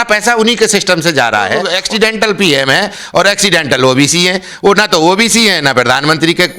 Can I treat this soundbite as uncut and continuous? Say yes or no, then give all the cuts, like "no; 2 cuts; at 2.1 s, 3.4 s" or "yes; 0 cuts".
no; 1 cut; at 1.7 s